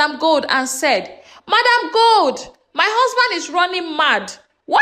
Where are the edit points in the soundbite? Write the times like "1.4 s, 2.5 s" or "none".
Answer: none